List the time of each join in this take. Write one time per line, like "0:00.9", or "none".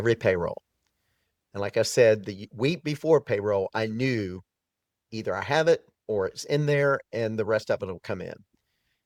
none